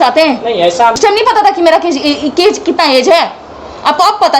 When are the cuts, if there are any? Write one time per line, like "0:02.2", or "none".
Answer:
0:01.0